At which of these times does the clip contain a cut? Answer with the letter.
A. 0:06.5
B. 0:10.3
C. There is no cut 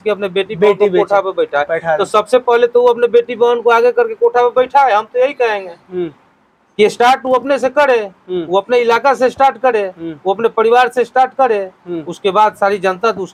C